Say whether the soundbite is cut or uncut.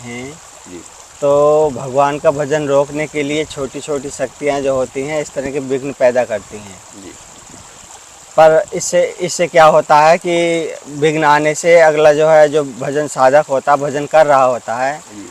uncut